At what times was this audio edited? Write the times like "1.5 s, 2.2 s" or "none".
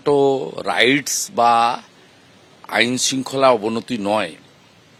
none